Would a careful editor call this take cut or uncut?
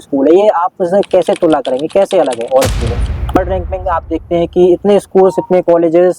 cut